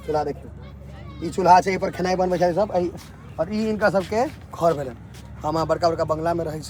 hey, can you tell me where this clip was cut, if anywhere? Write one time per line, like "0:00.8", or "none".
none